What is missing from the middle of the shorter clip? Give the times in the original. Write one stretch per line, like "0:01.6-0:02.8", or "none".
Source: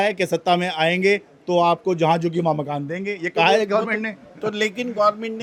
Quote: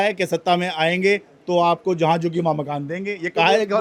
none